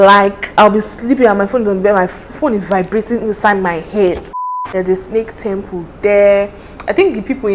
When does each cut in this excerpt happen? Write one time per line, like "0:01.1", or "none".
0:04.4